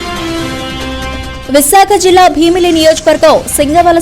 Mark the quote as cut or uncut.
uncut